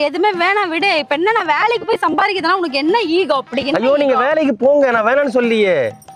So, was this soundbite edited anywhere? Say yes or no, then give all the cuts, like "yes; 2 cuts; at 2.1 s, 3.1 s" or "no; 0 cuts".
no; 0 cuts